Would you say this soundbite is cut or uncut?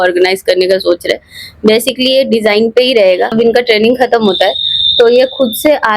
cut